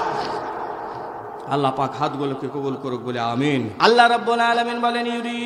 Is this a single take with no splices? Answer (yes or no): no